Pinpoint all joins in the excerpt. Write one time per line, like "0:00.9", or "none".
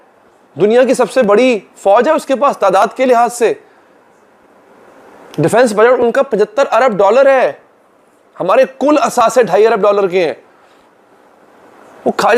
none